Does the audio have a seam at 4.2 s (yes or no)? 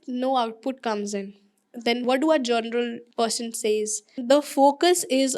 yes